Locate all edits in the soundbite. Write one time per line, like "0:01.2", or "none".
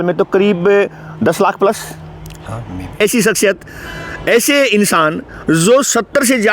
0:03.0